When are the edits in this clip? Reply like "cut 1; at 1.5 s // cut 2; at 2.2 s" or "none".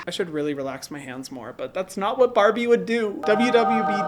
none